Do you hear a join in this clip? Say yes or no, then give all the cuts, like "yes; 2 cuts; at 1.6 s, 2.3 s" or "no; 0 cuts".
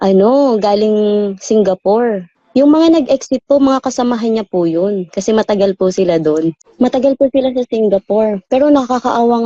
yes; 1 cut; at 6.6 s